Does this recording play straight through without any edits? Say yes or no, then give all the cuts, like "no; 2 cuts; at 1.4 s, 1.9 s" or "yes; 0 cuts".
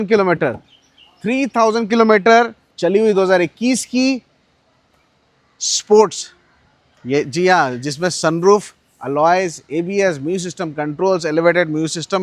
yes; 0 cuts